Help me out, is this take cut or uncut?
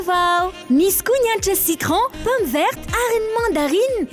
uncut